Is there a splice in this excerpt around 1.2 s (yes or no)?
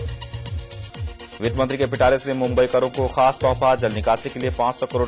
no